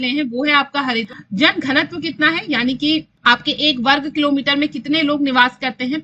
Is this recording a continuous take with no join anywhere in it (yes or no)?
no